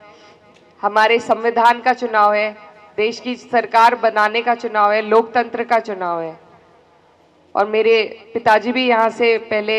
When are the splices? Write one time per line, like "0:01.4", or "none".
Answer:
none